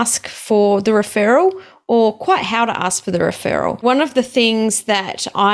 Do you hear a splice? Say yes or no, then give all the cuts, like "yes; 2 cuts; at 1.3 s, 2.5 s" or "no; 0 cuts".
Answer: yes; 1 cut; at 3.8 s